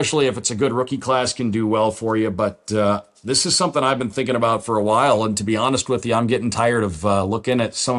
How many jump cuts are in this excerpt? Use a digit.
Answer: 0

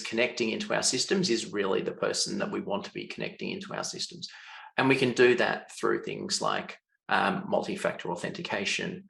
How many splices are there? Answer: 0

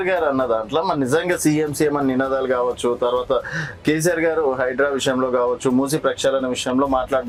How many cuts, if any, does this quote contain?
0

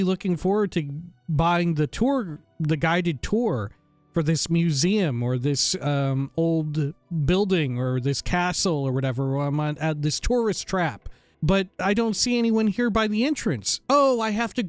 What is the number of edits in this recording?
1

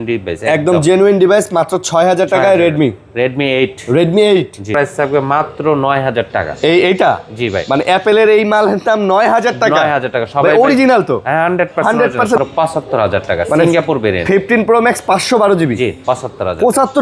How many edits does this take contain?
2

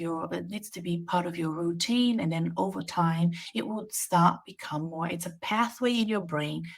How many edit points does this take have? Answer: 0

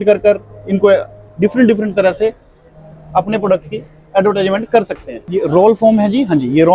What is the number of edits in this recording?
1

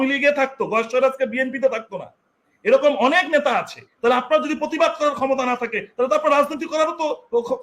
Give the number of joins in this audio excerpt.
1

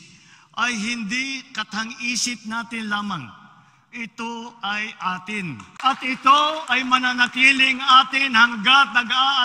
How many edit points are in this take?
1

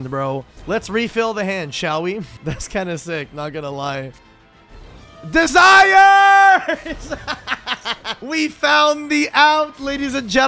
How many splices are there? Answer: 1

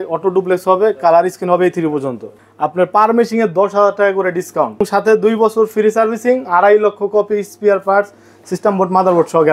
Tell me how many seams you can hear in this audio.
2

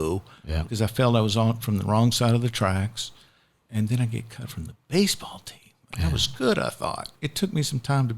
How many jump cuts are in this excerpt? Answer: 1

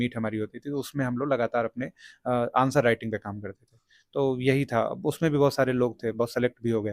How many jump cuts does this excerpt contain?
0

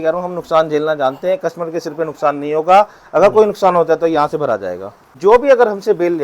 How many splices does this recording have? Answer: 1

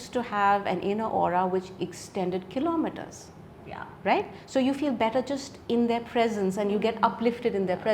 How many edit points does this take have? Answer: 0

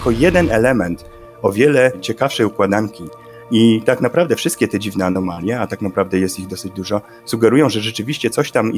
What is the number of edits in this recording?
0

